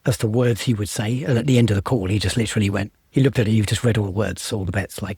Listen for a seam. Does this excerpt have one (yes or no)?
no